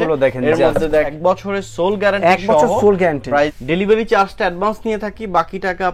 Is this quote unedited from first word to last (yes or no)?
no